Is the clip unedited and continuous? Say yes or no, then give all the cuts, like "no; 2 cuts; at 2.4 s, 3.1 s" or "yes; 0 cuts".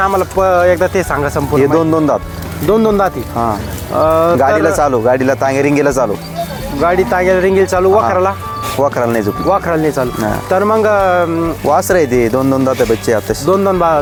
yes; 0 cuts